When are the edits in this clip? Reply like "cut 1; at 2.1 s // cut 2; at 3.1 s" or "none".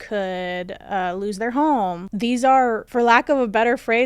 cut 1; at 2.0 s // cut 2; at 2.8 s